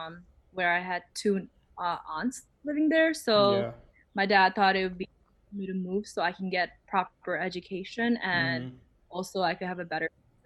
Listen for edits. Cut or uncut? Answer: uncut